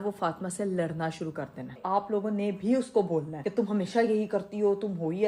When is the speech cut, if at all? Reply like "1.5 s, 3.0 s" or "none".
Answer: 1.8 s